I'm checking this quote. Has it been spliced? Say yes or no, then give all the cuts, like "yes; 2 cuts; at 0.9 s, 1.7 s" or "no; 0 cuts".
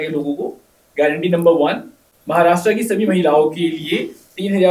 no; 0 cuts